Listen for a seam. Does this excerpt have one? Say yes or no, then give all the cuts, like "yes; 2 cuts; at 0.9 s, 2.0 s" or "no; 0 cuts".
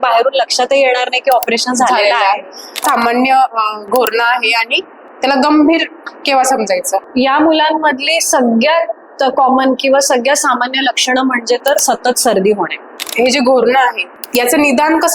yes; 2 cuts; at 2.8 s, 13.0 s